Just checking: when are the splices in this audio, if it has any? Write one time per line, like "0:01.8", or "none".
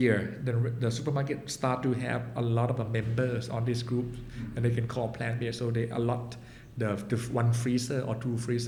none